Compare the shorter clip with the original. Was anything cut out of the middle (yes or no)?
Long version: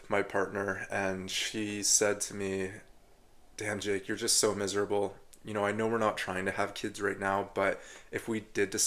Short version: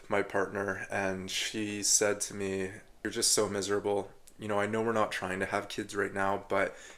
yes